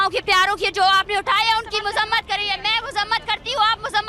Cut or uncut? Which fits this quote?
uncut